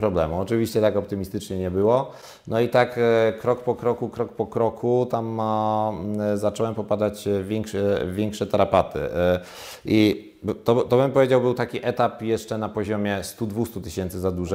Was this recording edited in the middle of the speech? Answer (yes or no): no